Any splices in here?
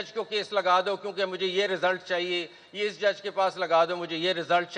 no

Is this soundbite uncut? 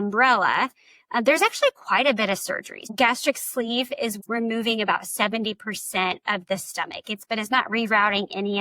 no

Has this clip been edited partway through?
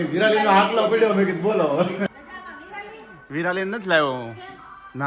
yes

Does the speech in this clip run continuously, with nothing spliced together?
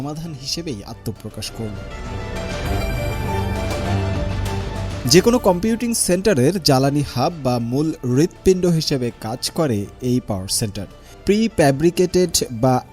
yes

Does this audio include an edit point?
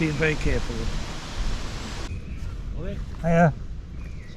yes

